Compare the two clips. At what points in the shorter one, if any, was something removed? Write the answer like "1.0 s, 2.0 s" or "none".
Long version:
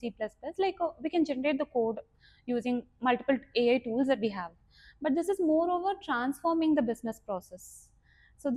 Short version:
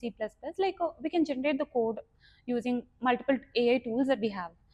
none